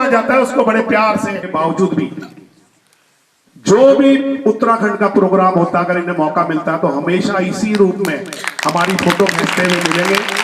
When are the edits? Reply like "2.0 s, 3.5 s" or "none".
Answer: 1.4 s